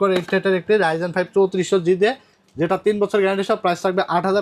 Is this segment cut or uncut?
uncut